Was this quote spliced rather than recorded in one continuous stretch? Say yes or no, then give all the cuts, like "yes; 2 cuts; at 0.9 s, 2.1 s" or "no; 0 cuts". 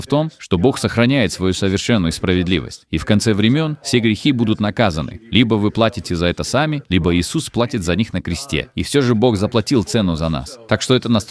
no; 0 cuts